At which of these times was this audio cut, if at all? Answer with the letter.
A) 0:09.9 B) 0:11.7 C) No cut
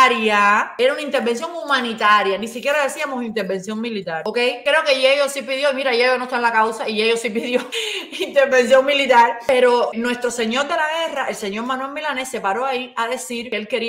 A